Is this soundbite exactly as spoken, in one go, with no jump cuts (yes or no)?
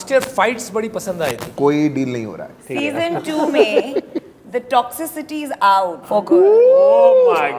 no